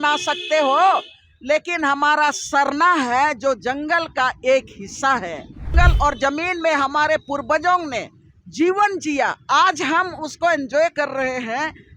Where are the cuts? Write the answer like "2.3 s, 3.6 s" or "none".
5.7 s